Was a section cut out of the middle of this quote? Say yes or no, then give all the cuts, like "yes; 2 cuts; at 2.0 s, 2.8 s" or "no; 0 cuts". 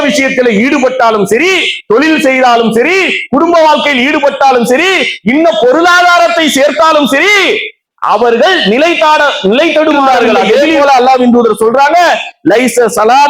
yes; 1 cut; at 10.4 s